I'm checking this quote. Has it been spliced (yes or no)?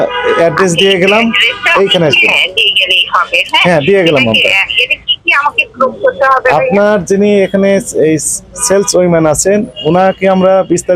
no